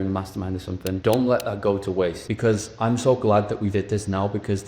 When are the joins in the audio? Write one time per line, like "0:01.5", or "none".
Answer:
0:01.0
0:02.2